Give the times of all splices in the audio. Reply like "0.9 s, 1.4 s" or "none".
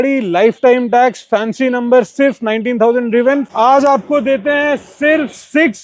3.5 s